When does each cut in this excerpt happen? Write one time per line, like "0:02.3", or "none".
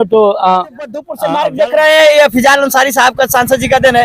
0:01.1

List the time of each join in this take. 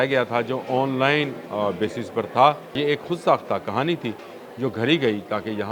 0:02.8

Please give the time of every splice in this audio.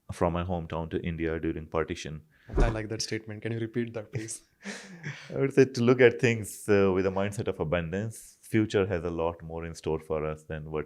0:02.5

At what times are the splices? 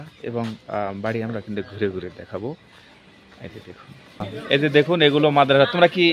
0:04.3

